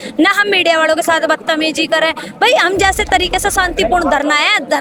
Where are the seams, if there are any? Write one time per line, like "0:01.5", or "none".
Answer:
none

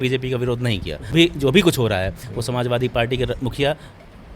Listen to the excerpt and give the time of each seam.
0:01.1

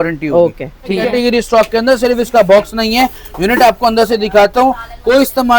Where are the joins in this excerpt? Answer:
0:01.0

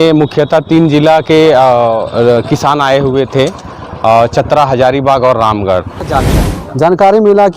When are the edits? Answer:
0:06.1

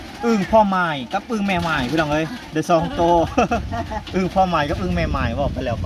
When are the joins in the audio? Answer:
none

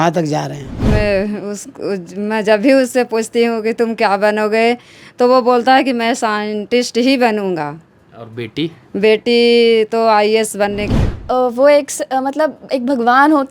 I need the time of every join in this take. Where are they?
0:00.8
0:11.0

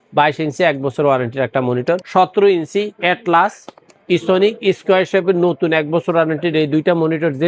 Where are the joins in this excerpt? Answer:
0:02.0

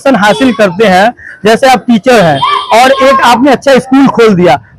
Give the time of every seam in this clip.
none

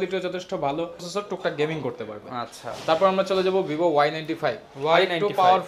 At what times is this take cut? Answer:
0:01.1

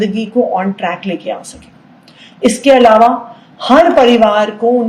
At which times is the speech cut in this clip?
none

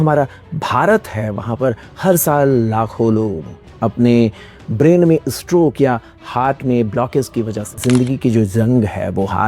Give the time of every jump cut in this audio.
0:07.8

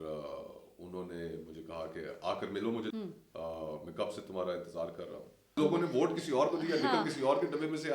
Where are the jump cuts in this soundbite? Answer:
0:02.9
0:05.3

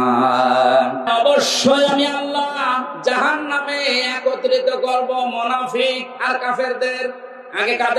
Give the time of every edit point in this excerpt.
0:01.0

